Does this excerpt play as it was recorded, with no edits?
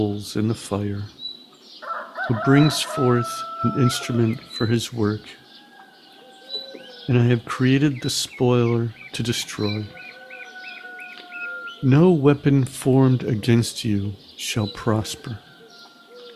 yes; 0 cuts

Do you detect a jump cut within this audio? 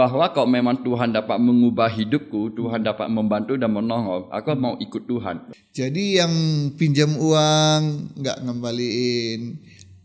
yes; 1 cut; at 5.4 s

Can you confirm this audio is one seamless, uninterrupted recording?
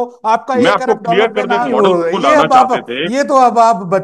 no; 1 cut; at 1.7 s

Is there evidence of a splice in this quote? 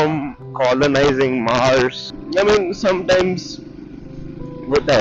yes; 1 cut; at 2.1 s

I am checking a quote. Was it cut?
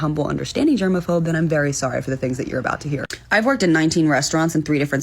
no; 0 cuts

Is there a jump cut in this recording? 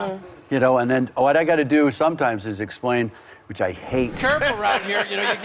yes; 1 cut; at 4.2 s

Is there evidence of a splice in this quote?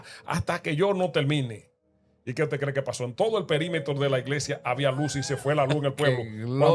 no; 0 cuts

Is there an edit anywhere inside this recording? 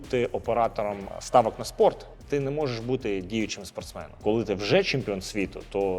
yes; 2 cuts; at 1.1 s, 4.2 s

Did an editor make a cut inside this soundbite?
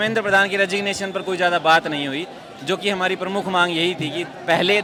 no; 0 cuts

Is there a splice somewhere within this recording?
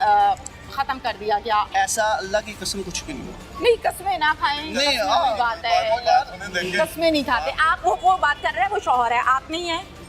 yes; 1 cut; at 1.7 s

